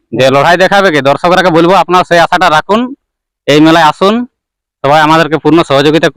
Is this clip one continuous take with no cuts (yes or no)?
yes